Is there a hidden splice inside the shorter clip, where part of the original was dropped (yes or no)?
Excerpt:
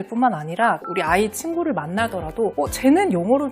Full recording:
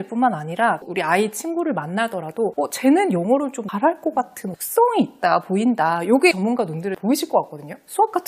no